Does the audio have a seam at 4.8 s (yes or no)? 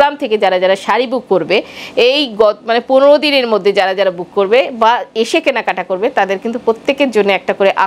no